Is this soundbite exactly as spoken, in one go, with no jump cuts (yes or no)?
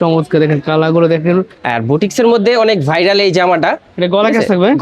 no